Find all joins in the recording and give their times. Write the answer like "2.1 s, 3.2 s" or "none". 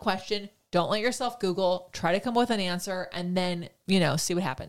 3.8 s